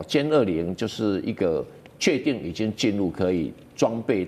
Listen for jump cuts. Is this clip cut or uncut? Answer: uncut